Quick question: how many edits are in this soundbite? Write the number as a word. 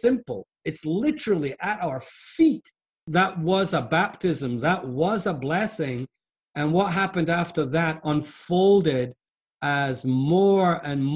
one